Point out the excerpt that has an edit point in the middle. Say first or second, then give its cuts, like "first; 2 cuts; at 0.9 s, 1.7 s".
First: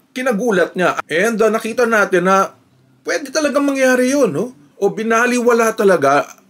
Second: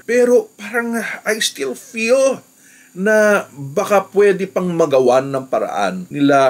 first; 2 cuts; at 1.0 s, 4.6 s